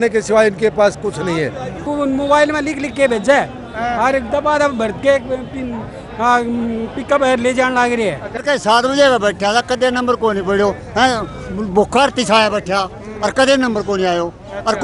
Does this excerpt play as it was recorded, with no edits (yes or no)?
no